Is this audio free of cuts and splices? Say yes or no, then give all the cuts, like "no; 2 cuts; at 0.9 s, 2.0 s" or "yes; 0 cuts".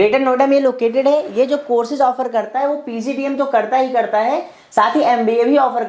yes; 0 cuts